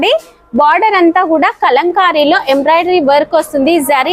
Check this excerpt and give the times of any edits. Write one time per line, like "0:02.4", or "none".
none